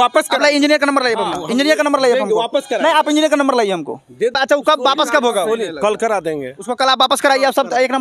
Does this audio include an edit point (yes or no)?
yes